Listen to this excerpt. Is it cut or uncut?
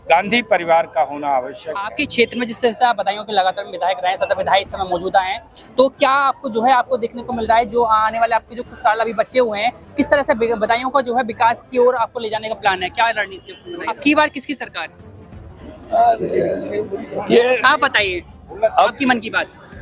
cut